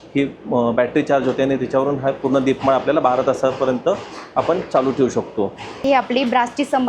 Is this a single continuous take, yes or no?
no